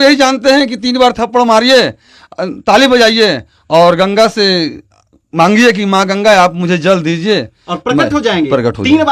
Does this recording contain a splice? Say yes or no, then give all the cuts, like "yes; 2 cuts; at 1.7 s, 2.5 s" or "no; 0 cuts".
no; 0 cuts